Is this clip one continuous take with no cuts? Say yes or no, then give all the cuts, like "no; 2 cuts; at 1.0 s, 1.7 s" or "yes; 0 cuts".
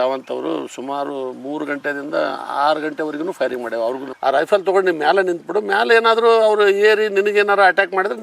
no; 1 cut; at 4.1 s